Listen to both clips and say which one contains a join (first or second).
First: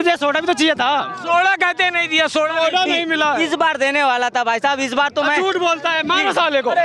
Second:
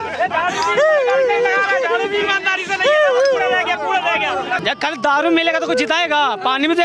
second